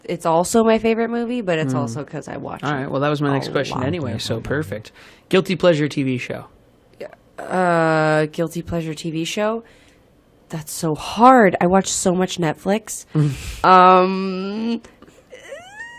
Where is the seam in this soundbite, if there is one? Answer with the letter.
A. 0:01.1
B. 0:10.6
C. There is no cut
A